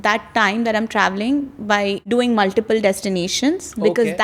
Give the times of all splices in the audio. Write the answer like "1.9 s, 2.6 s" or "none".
2.0 s